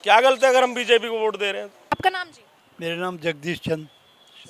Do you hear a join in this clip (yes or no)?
no